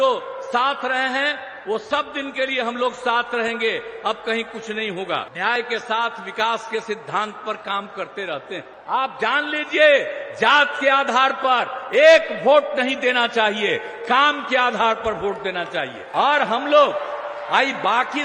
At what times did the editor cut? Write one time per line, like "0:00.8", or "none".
0:05.6
0:08.7
0:16.0